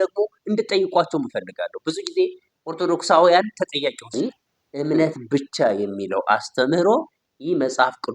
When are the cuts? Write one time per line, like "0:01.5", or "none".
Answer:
0:04.1